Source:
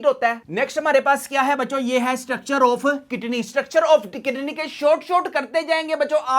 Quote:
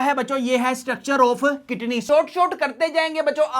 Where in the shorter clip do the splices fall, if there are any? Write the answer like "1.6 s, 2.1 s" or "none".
2.0 s

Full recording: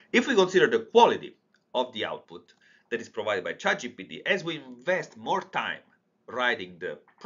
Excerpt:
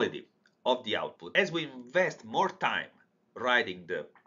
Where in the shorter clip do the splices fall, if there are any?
1.2 s

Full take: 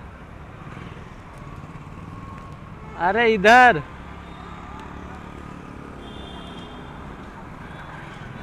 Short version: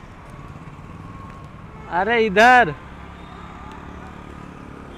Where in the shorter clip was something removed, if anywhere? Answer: none

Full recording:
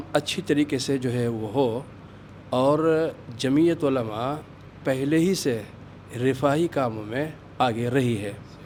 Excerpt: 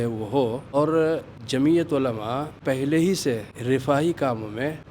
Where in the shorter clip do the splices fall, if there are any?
0.7 s, 2.5 s, 3.5 s

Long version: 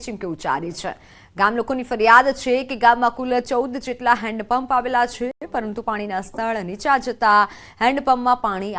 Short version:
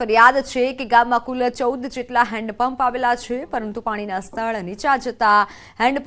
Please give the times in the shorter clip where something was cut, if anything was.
3.4 s

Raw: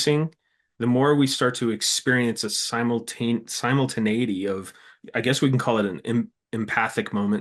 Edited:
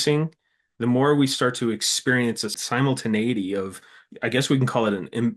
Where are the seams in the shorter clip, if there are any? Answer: 2.6 s

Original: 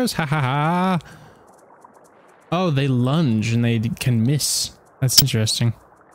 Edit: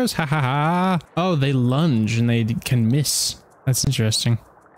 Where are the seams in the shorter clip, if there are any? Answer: 1.1 s

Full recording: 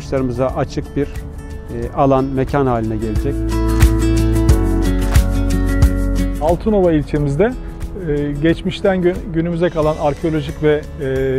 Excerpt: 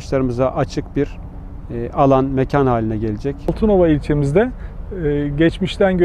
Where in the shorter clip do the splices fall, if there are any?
3.5 s

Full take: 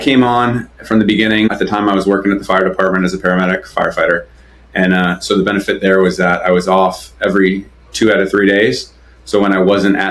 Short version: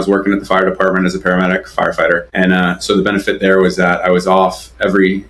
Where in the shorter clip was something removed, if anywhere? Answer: 2.3 s

